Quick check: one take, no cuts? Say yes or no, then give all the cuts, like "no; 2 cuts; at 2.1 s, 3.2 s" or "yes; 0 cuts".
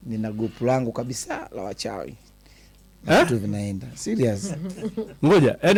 yes; 0 cuts